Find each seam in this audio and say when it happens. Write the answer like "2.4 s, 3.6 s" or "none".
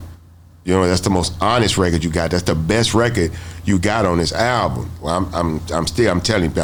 none